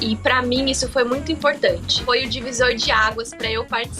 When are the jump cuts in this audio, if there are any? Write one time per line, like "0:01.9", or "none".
0:01.9